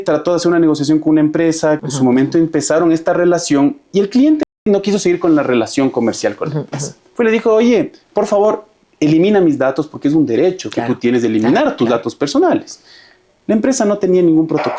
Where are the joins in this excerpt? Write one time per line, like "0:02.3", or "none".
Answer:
0:01.8
0:04.6
0:08.0